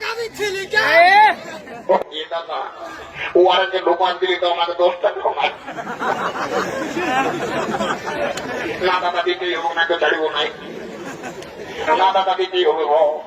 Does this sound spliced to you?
yes; 1 cut; at 2.0 s

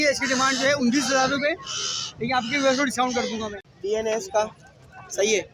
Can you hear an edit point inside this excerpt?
yes; 1 cut; at 3.6 s

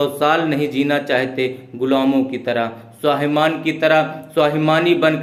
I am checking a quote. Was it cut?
no; 0 cuts

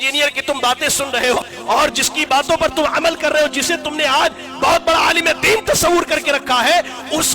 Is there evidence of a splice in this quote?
yes; 1 cut; at 1.4 s

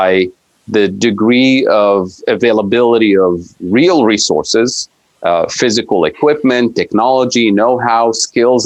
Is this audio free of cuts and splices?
yes; 0 cuts

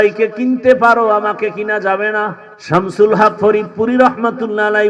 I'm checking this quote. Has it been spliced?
yes; 1 cut; at 2.5 s

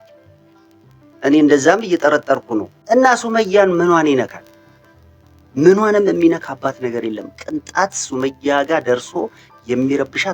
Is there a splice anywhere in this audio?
yes; 1 cut; at 2.7 s

